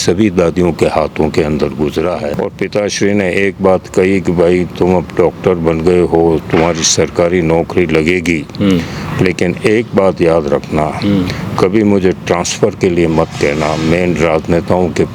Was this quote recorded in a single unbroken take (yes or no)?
no